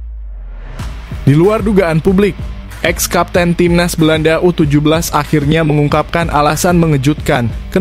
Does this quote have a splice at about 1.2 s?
yes; 1 cut; at 1.2 s

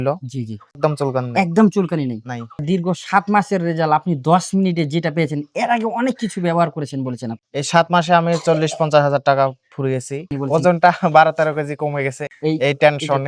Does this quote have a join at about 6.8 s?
no; 2 cuts; at 2.6 s, 10.2 s

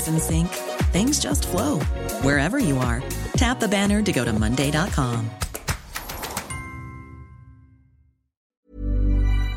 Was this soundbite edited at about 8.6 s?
yes; 1 cut; at 8.6 s

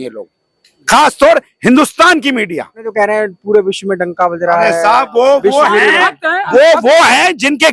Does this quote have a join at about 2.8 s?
yes; 1 cut; at 2.8 s

